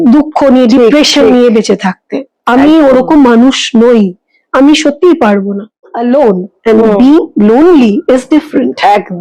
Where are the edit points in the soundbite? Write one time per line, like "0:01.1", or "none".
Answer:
0:06.0